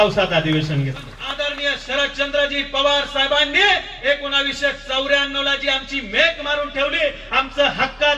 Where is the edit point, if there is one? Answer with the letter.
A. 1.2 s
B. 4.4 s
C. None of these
A